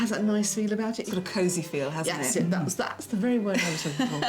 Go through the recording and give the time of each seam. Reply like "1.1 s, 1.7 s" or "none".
1.0 s